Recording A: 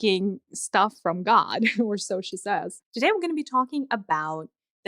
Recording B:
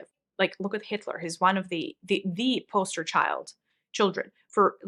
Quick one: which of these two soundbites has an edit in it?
A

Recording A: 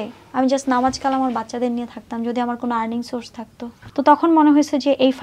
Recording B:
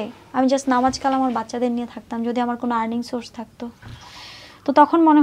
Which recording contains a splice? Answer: A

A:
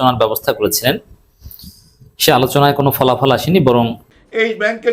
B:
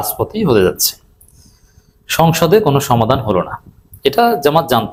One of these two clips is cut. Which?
A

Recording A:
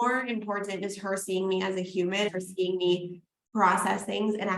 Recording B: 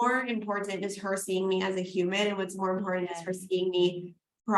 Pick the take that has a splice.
A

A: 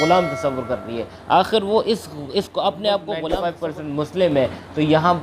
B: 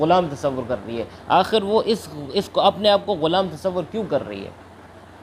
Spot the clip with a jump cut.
A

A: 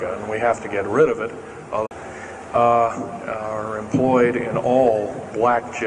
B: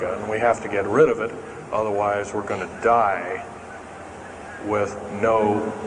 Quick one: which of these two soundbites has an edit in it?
B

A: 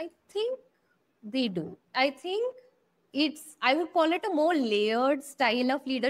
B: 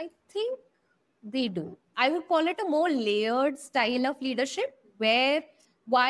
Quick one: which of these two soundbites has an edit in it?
B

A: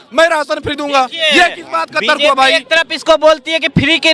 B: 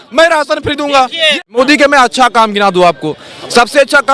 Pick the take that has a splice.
B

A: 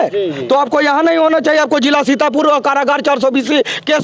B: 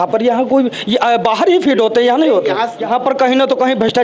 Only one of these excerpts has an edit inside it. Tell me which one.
B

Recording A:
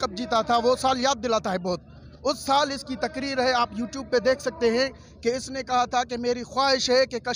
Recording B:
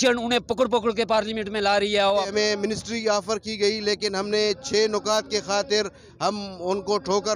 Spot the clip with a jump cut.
B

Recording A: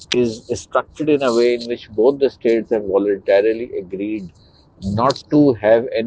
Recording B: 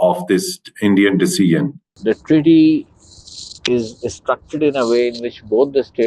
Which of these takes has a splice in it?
B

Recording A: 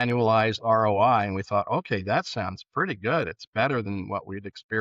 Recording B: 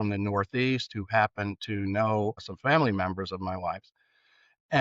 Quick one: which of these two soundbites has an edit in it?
B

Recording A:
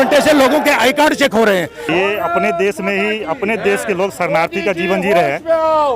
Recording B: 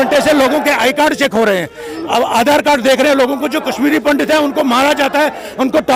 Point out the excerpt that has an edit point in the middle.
A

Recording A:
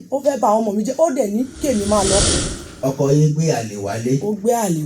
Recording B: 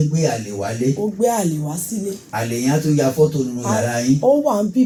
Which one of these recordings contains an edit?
A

